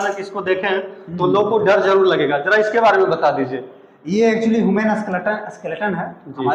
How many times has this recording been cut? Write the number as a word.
zero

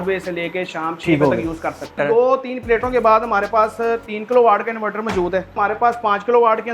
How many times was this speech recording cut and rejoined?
two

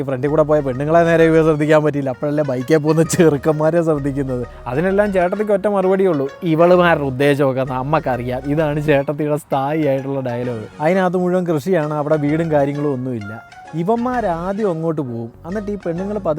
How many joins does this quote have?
two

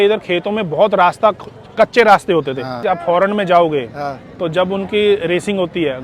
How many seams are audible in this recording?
one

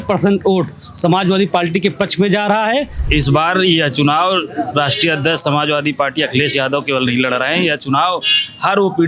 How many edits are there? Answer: one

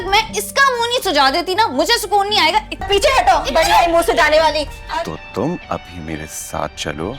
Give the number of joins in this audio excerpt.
two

